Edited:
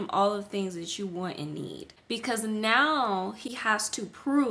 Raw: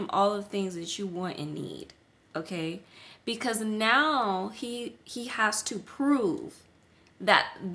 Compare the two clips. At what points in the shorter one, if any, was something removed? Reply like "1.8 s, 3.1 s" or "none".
1.9 s, 3.5 s